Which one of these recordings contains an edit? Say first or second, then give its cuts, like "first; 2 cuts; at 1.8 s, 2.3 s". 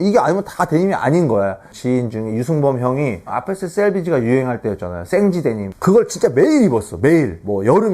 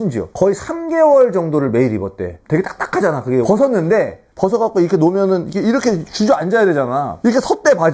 first; 1 cut; at 1.7 s